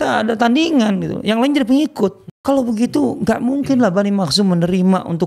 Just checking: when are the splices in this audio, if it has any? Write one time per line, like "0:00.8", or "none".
0:02.3